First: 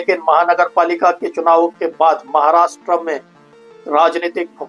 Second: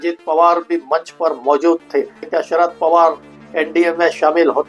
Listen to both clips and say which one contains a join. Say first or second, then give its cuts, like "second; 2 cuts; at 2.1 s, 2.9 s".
second; 1 cut; at 2.3 s